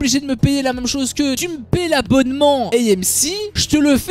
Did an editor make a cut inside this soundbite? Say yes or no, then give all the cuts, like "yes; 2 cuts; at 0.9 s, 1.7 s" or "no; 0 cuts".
yes; 1 cut; at 1.4 s